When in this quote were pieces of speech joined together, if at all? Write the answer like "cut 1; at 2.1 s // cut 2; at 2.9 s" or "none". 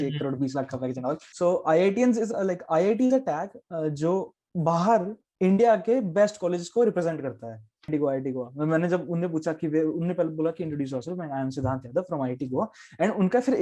cut 1; at 1.3 s // cut 2; at 7.9 s